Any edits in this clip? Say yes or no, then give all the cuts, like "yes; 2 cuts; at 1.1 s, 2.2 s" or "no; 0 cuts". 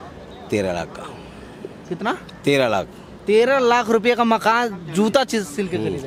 no; 0 cuts